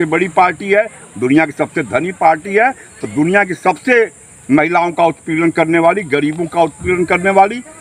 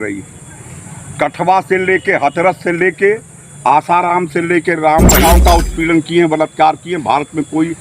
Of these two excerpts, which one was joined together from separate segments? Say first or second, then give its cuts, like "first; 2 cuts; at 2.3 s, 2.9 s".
second; 1 cut; at 5.2 s